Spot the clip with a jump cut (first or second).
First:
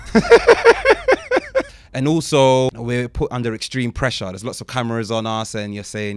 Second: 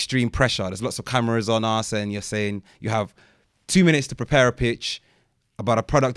first